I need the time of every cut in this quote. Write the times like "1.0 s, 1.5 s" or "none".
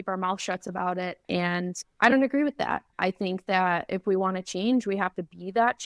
1.7 s